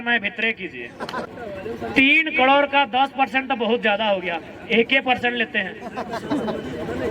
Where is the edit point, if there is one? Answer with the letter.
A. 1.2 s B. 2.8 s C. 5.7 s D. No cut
A